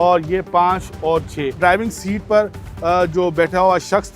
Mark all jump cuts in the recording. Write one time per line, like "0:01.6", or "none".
0:01.6